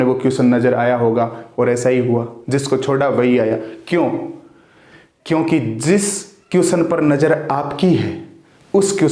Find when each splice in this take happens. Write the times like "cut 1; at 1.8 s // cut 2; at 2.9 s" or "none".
cut 1; at 1.4 s